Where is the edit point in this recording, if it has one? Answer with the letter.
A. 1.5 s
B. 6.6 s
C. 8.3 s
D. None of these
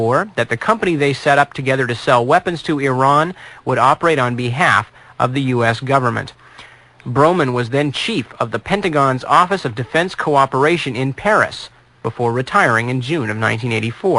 B